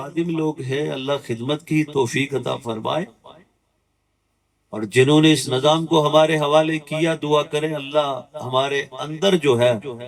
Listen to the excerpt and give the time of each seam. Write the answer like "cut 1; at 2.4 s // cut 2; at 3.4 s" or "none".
none